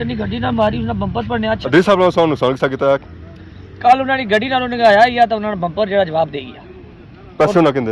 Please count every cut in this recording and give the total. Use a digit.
1